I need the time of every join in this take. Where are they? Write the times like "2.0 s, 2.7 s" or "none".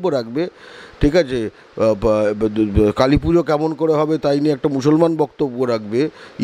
none